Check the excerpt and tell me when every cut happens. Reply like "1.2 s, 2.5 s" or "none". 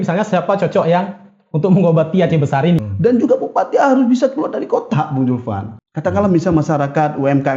2.8 s, 5.7 s